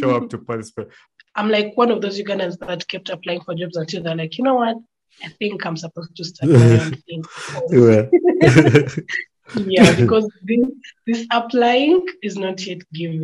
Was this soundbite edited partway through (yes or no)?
yes